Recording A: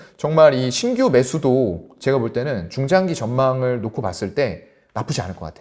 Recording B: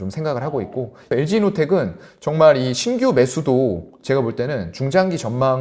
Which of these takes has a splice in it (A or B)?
B